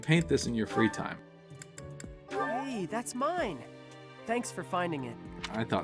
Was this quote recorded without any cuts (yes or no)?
no